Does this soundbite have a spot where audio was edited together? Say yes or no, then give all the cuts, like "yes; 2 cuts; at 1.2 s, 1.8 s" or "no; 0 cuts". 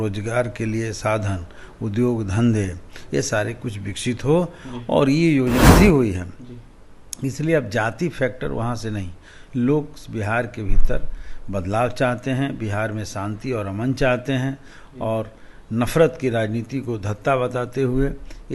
yes; 1 cut; at 5.6 s